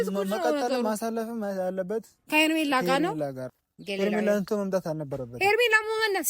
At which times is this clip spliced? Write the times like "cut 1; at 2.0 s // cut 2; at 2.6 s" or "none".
cut 1; at 3.4 s